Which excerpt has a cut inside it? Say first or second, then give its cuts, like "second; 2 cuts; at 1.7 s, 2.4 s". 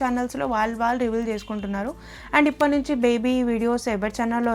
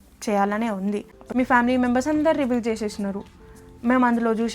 second; 1 cut; at 1.2 s